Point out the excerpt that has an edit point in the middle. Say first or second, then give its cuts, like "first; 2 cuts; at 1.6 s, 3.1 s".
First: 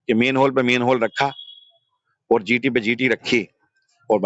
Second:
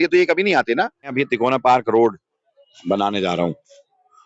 second; 1 cut; at 1.1 s